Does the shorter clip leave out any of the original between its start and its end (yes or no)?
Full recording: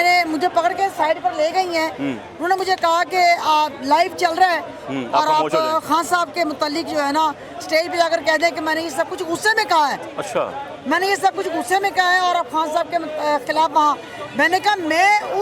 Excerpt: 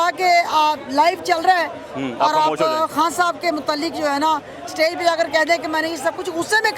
no